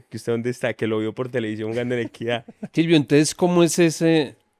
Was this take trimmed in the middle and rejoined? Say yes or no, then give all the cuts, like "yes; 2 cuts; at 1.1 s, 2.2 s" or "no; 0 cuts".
yes; 1 cut; at 2.6 s